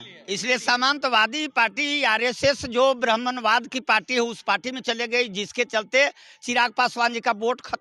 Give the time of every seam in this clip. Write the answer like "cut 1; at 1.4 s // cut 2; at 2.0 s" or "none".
none